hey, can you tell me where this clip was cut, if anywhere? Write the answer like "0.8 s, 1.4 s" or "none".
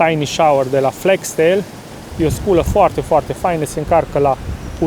none